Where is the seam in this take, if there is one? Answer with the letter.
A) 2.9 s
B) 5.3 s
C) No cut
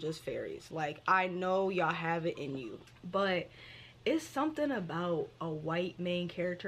A